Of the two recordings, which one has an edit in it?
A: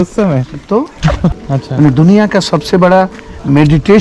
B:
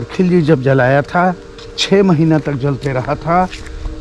A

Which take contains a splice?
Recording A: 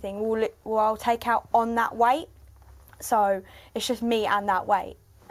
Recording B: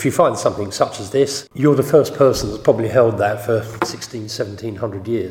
B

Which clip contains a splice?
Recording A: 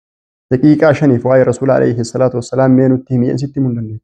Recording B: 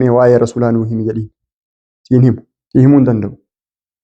B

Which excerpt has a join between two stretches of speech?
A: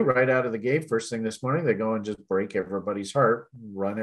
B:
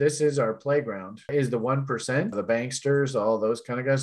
B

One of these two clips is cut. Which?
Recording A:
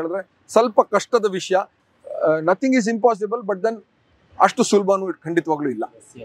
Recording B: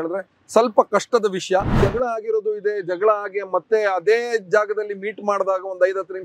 B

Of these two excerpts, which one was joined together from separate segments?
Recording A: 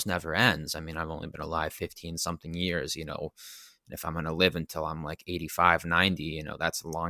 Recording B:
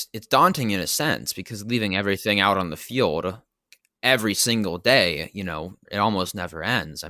B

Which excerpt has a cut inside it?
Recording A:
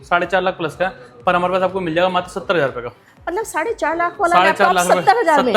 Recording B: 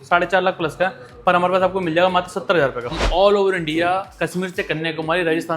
B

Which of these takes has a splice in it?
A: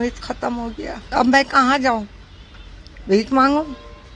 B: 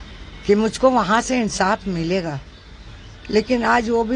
A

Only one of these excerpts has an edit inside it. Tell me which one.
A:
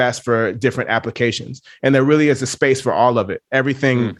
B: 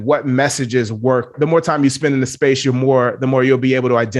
B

